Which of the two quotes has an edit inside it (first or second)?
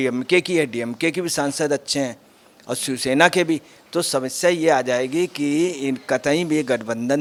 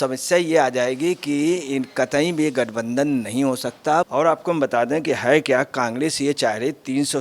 second